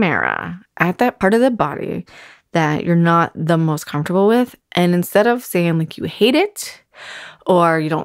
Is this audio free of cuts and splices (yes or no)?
no